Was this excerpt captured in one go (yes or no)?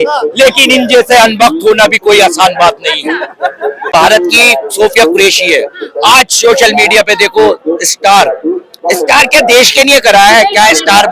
no